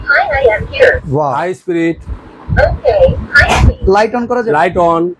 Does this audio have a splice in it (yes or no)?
no